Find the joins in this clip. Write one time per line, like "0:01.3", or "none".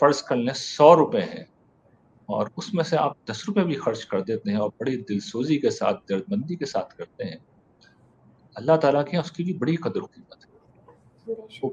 none